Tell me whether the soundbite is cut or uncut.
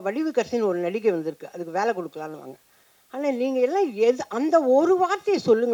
uncut